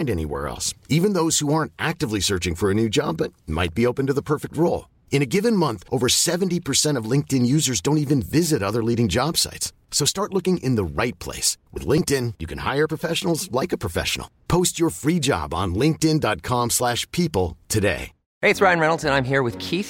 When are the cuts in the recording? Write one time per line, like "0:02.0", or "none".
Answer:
0:18.2